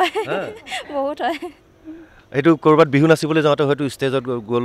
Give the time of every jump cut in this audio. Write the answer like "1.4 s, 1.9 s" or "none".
none